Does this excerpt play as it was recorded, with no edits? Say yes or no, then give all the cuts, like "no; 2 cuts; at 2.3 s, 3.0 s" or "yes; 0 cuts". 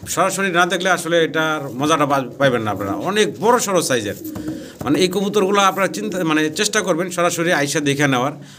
yes; 0 cuts